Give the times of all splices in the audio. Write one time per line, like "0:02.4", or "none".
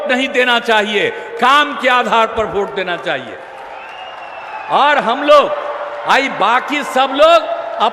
none